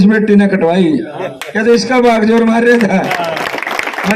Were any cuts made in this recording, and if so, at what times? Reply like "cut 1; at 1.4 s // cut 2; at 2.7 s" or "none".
none